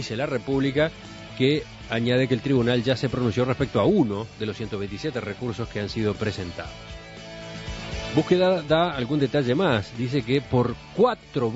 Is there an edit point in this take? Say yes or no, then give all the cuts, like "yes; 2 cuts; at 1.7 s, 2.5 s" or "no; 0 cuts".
no; 0 cuts